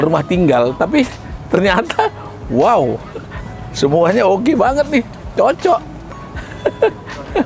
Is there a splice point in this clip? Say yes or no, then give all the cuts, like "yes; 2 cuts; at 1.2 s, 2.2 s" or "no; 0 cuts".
no; 0 cuts